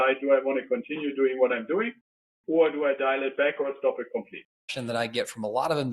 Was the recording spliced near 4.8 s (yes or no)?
yes